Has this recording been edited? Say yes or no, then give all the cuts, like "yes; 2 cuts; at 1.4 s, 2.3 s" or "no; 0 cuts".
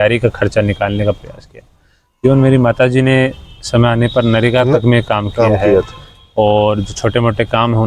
no; 0 cuts